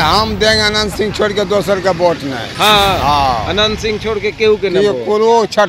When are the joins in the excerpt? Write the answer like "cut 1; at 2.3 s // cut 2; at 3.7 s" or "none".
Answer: none